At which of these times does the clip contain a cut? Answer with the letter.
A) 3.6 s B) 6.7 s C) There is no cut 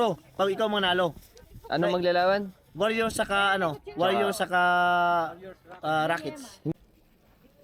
B